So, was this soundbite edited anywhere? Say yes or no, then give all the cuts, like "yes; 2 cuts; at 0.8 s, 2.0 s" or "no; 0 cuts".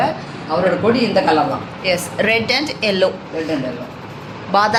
no; 0 cuts